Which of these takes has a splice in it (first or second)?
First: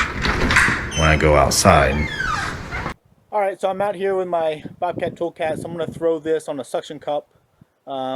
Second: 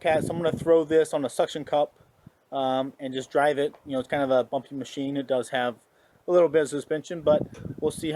first